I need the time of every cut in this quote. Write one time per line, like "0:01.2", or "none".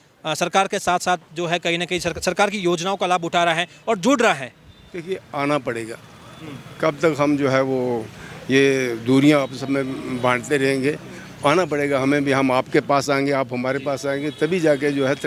none